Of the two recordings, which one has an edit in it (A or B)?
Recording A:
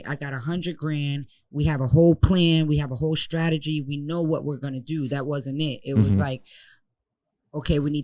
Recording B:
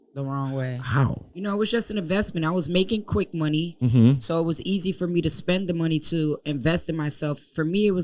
B